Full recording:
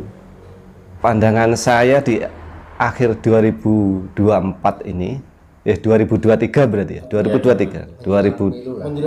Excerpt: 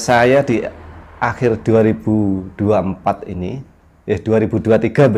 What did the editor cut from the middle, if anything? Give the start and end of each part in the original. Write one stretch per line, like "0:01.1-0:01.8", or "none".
none